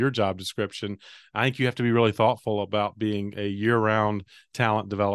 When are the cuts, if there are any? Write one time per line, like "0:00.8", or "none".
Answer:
none